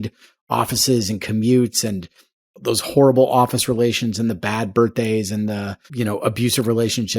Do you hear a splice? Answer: yes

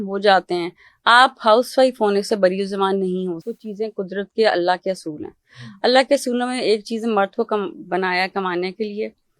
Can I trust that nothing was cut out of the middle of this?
no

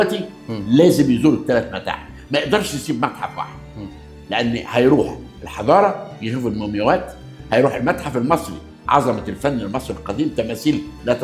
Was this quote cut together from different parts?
no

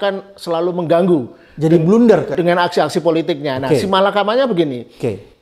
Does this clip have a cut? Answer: no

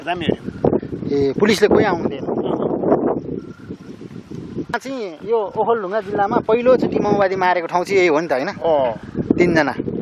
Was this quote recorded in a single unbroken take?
no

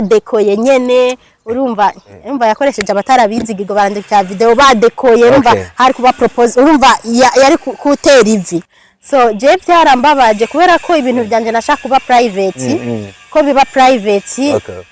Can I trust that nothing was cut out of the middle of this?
no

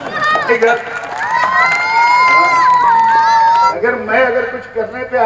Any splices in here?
yes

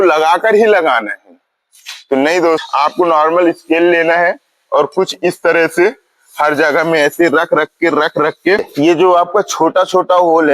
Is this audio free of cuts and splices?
no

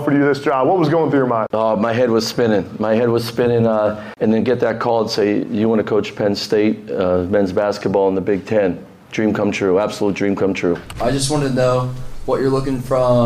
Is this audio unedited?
no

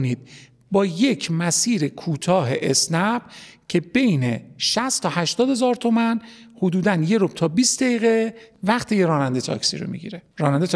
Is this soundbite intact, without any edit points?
no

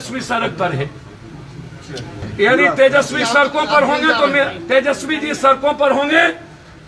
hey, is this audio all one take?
no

